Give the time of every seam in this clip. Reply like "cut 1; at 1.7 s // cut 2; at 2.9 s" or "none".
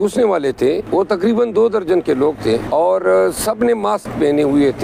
cut 1; at 1.3 s // cut 2; at 2.6 s